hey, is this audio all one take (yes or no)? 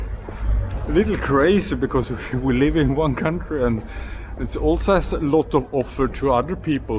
yes